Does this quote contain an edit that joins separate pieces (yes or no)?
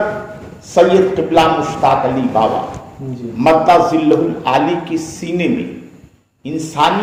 no